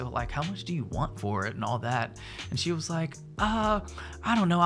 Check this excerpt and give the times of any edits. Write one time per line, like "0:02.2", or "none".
none